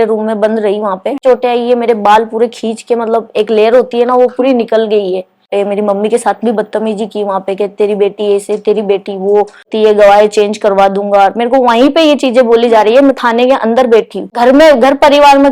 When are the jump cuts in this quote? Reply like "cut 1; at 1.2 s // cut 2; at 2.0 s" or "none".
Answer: cut 1; at 1.2 s // cut 2; at 5.4 s // cut 3; at 9.7 s // cut 4; at 14.3 s